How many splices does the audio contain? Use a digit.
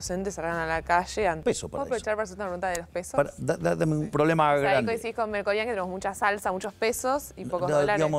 2